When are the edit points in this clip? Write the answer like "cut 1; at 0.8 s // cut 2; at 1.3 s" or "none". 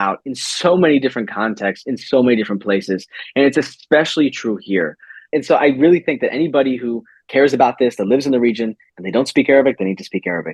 cut 1; at 5.3 s // cut 2; at 7.1 s